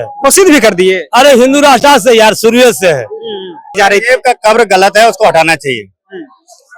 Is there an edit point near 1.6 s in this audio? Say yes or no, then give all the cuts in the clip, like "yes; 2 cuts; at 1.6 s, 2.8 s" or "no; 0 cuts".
no; 1 cut; at 3.8 s